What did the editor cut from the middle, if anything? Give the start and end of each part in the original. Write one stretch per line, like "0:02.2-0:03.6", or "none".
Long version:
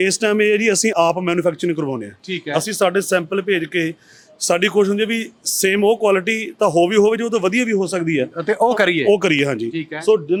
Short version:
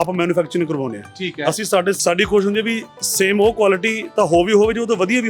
0:03.1-0:04.4